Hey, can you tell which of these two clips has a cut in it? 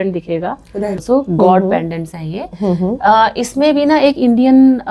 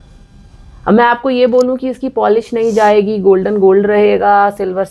first; 1 cut; at 1.0 s

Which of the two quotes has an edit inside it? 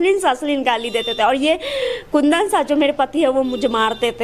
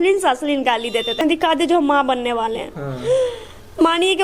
second; 1 cut; at 1.2 s

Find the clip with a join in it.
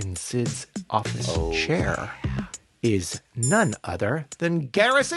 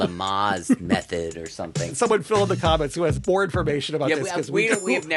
second; 2 cuts; at 1.9 s, 3.2 s

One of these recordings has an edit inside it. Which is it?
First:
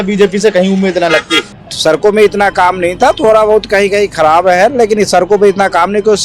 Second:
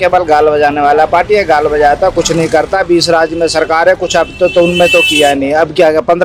first; 1 cut; at 1.4 s

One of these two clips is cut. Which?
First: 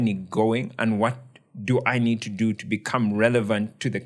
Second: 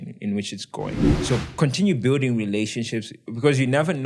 second; 1 cut; at 1.1 s

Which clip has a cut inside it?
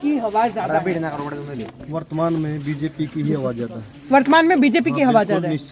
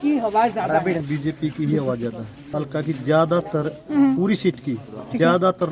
second; 2 cuts; at 1.0 s, 2.4 s

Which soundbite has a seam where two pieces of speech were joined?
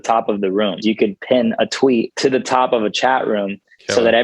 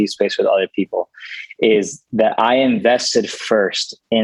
first; 2 cuts; at 0.8 s, 2.1 s

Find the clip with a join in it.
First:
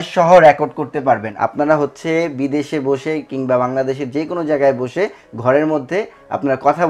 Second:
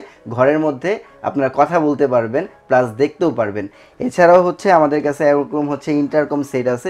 first; 1 cut; at 1.3 s

